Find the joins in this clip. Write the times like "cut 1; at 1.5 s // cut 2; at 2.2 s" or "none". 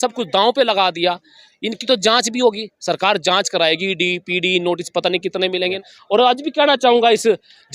cut 1; at 5.9 s